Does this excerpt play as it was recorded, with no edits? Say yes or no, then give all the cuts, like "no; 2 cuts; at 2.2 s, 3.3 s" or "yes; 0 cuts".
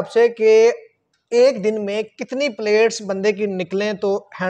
yes; 0 cuts